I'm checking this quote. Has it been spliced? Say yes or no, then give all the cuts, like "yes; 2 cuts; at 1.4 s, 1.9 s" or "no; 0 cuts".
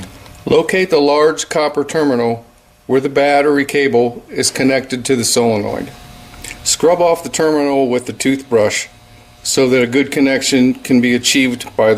yes; 1 cut; at 1.9 s